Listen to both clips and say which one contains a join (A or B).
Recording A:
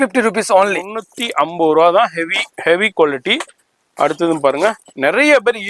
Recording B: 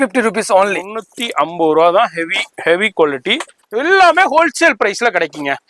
B